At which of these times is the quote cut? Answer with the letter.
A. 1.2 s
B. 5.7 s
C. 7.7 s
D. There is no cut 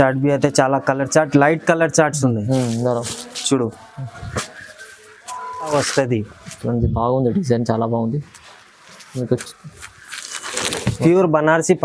B